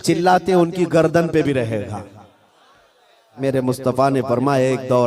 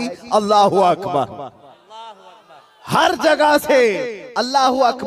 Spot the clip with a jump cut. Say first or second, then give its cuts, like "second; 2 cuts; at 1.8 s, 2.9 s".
first; 1 cut; at 3.3 s